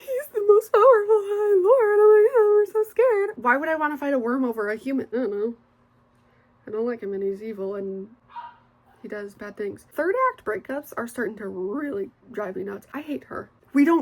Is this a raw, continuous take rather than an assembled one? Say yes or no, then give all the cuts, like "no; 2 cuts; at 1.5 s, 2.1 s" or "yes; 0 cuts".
no; 4 cuts; at 3.4 s, 5.1 s, 9.8 s, 13.1 s